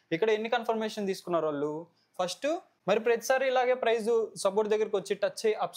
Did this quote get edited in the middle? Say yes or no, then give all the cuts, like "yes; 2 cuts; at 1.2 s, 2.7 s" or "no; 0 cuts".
yes; 1 cut; at 2.7 s